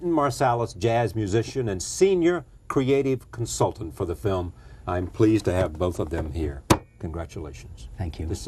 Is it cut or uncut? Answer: cut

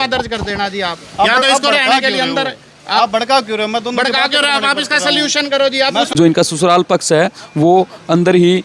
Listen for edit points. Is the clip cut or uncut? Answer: cut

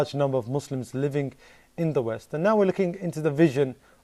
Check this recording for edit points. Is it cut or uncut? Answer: cut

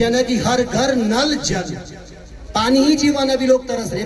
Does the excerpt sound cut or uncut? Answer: uncut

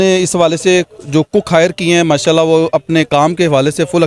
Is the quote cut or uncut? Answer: uncut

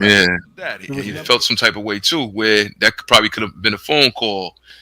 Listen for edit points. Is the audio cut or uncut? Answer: cut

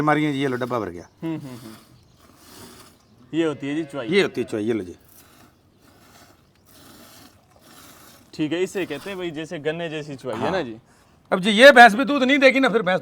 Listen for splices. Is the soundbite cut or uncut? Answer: uncut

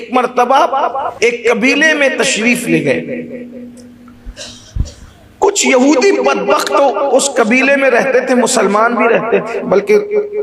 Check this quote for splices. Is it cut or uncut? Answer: cut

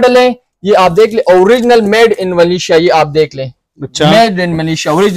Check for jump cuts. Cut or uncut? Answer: uncut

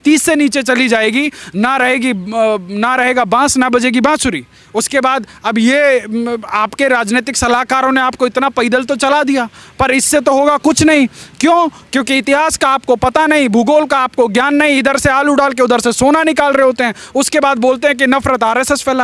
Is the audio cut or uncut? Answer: uncut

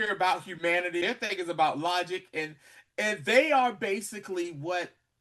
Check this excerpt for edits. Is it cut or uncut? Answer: cut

